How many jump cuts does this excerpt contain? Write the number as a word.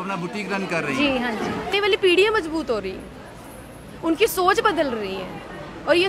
one